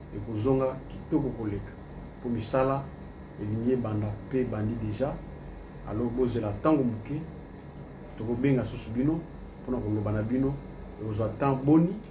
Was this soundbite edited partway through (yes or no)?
no